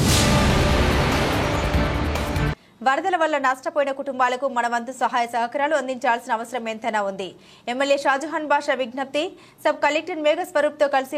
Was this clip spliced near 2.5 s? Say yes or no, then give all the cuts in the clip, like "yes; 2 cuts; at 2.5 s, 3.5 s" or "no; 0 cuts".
yes; 1 cut; at 2.5 s